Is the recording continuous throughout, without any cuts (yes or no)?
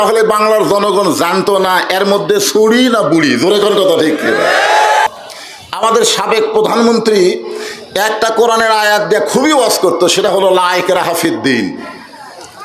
no